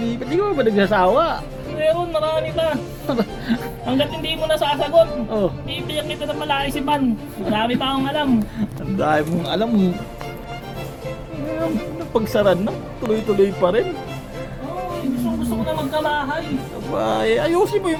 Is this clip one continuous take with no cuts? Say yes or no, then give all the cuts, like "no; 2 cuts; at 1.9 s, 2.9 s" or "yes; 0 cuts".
yes; 0 cuts